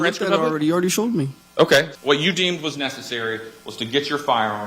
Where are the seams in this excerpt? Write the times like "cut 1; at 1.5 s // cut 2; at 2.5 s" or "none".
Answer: cut 1; at 1.9 s